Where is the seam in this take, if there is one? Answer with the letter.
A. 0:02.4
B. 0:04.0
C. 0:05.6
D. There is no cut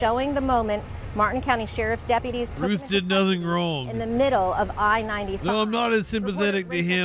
D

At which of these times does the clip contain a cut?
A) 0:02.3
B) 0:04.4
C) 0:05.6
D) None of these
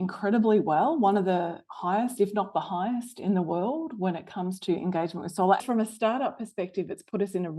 C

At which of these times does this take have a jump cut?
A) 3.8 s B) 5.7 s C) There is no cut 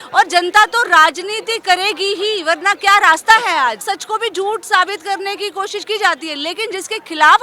A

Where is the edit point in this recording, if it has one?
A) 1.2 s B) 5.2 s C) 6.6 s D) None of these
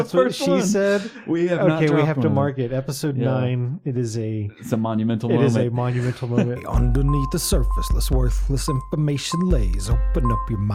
C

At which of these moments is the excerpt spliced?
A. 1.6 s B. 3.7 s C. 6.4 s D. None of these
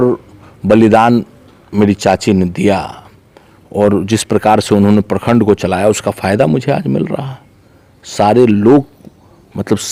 D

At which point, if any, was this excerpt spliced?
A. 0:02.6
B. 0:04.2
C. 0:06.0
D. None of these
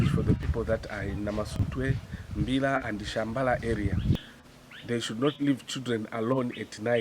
B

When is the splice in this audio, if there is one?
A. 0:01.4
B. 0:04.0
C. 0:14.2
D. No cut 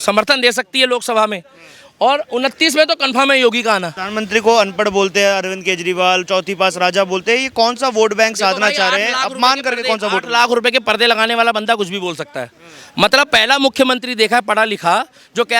B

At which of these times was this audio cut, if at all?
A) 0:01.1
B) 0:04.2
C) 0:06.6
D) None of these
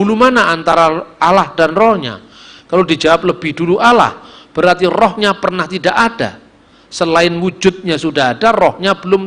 D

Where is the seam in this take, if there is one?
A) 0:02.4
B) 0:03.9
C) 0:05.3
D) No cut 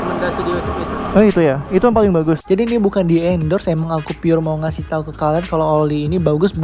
A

